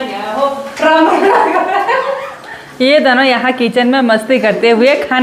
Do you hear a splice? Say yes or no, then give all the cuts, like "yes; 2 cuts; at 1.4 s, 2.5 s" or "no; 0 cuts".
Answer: no; 0 cuts